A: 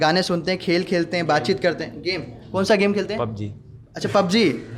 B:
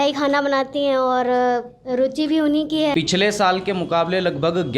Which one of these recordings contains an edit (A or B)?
B